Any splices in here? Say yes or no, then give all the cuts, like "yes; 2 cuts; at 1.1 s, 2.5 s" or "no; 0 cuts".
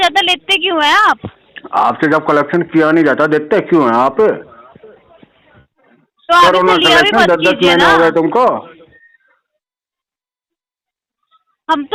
no; 0 cuts